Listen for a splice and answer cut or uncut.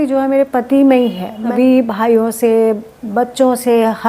cut